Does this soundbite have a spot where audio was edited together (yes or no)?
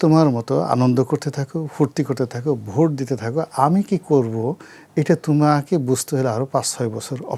no